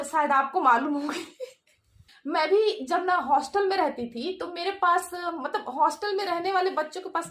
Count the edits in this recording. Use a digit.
1